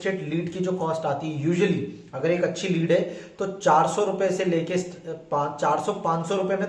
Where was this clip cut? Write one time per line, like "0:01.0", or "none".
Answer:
none